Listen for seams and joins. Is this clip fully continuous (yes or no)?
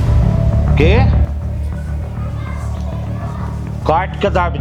yes